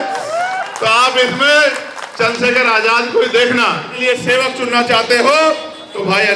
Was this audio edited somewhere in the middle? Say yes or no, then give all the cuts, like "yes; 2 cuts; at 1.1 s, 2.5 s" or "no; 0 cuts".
yes; 1 cut; at 4.0 s